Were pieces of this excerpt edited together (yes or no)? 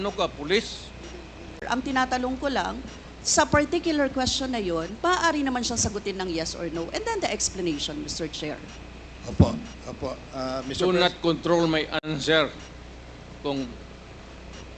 yes